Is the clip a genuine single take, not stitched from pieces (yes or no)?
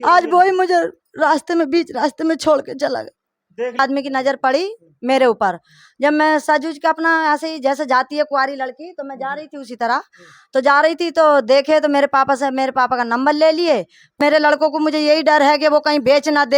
no